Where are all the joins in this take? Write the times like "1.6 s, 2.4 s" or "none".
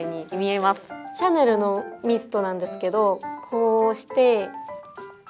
none